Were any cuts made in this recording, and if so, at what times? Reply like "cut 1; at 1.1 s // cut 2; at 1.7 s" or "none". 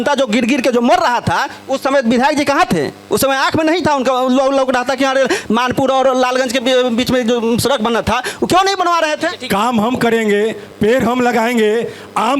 cut 1; at 9.3 s